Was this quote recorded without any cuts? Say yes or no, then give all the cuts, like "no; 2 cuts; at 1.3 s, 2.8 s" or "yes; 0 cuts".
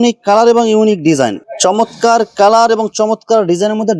no; 1 cut; at 1.4 s